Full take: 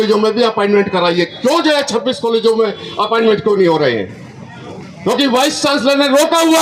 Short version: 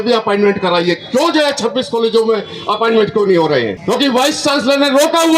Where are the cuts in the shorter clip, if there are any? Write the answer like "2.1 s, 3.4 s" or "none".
3.8 s